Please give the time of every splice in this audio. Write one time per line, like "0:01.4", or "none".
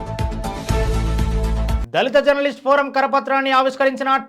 0:01.8